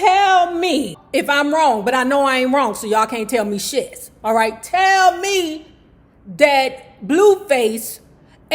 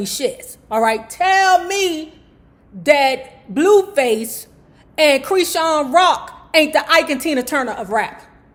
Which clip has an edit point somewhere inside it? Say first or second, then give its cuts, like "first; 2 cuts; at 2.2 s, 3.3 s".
first; 1 cut; at 1.0 s